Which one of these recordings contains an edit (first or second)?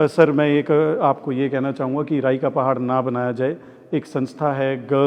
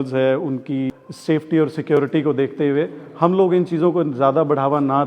second